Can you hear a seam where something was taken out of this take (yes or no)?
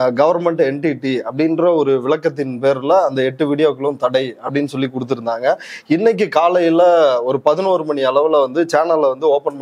no